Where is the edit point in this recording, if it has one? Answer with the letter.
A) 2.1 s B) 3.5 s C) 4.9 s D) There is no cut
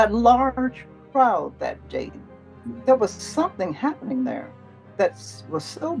D